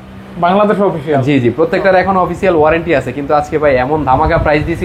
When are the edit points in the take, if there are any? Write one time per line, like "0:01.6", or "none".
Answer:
none